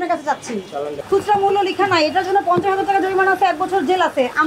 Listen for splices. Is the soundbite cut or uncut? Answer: cut